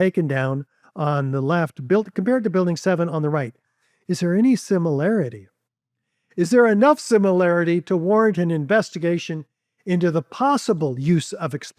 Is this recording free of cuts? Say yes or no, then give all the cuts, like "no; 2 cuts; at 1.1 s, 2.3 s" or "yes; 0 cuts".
yes; 0 cuts